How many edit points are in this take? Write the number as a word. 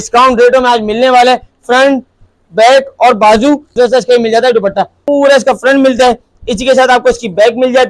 two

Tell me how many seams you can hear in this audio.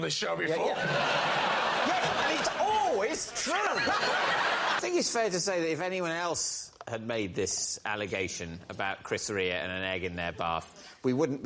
one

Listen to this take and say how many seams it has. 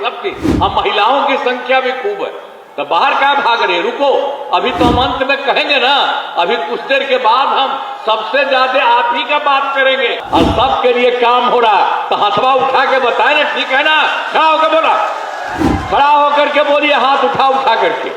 one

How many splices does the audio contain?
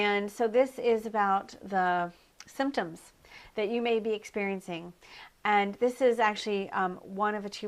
zero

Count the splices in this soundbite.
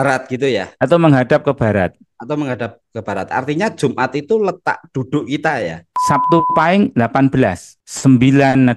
one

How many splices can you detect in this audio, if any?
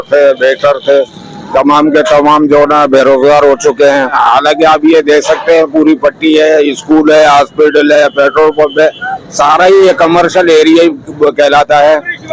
one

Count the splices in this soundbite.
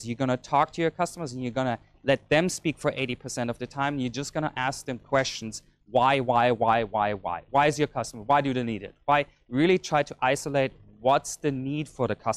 zero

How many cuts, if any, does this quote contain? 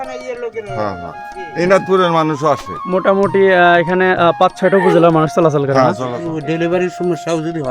one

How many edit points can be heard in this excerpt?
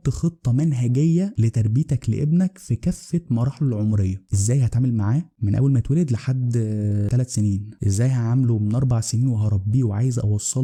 zero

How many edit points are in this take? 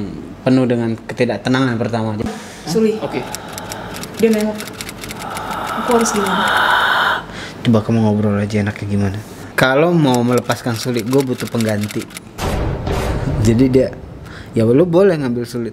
two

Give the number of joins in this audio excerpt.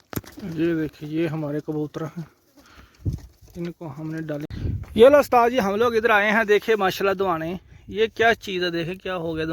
one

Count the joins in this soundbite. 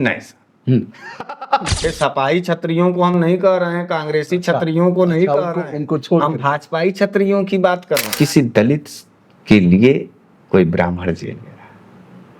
two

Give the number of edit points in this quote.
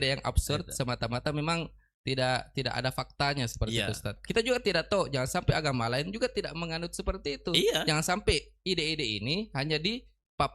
one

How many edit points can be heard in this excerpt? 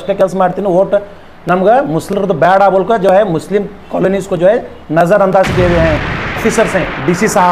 one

